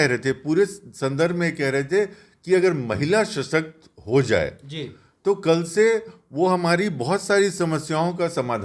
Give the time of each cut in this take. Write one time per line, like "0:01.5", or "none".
none